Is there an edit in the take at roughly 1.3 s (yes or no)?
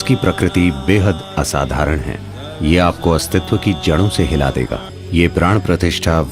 no